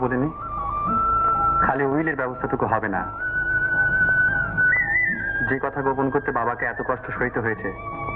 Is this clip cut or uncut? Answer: uncut